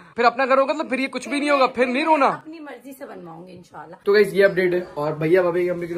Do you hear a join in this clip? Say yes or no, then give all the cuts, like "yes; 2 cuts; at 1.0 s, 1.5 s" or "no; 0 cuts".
no; 0 cuts